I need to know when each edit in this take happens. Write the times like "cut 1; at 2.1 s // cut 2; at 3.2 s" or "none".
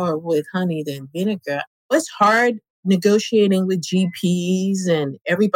cut 1; at 1.9 s